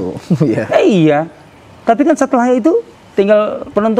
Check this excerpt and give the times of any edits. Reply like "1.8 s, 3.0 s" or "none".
3.0 s